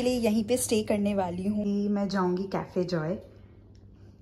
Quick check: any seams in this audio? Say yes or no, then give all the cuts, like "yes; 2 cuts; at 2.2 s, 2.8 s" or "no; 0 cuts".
yes; 1 cut; at 1.6 s